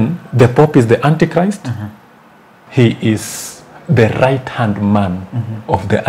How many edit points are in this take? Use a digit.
1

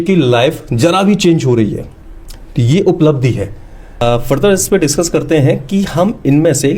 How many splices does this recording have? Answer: 1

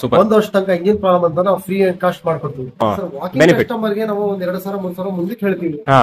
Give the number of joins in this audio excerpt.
1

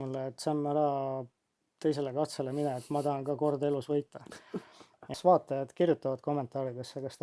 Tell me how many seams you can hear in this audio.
1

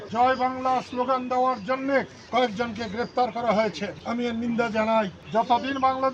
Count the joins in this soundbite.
1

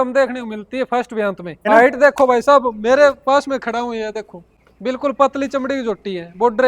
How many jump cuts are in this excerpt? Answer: 2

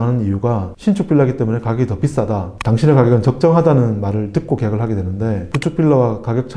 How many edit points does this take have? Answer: 2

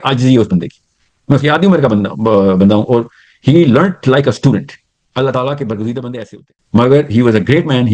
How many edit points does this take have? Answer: 1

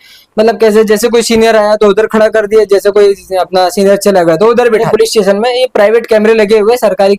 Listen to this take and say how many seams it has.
1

